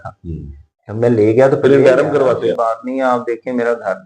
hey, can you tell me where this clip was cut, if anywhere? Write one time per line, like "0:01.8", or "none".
0:02.5